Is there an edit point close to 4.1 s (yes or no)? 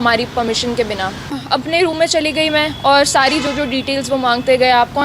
no